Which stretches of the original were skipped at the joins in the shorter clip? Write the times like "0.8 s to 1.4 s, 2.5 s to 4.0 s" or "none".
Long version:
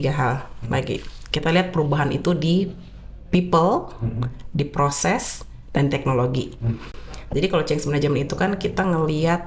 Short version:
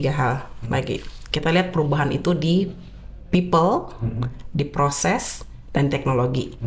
none